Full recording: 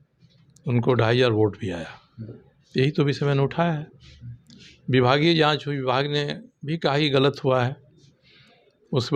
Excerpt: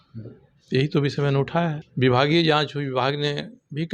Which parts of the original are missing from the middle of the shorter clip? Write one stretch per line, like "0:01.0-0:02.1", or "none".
0:03.9-0:04.8